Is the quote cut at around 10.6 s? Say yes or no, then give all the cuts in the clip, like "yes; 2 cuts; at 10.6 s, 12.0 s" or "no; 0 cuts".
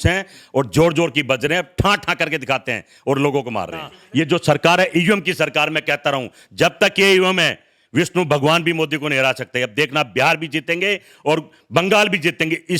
no; 1 cut; at 4.0 s